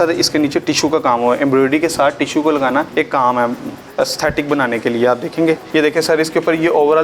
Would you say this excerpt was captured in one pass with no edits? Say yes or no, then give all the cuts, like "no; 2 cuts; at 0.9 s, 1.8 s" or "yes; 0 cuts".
no; 3 cuts; at 2.9 s, 3.7 s, 5.6 s